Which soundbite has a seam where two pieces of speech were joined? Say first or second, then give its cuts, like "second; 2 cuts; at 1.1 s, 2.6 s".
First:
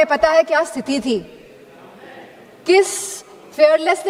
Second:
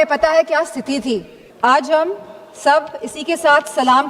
second; 1 cut; at 1.4 s